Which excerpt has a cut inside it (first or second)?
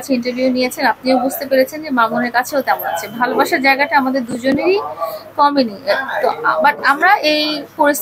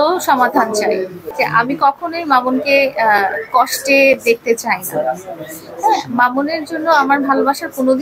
second